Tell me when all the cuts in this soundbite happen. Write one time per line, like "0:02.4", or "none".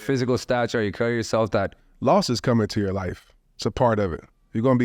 0:01.8